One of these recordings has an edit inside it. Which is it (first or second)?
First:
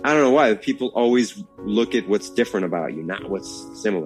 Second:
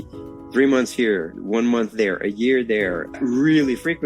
second